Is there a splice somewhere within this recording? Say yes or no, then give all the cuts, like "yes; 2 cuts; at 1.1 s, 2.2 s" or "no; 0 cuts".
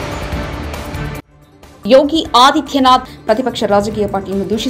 no; 0 cuts